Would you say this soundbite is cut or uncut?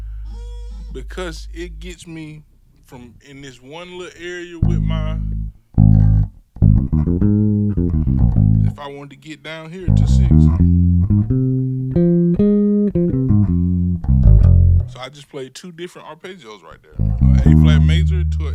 uncut